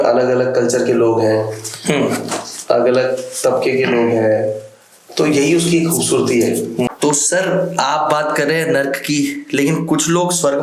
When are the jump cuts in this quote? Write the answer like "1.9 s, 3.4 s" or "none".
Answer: 6.9 s